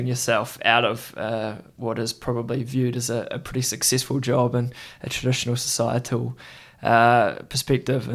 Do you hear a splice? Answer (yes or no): no